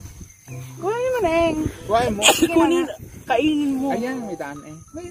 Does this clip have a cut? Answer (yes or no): no